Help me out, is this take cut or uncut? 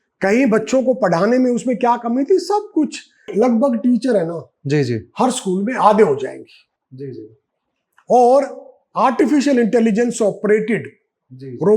cut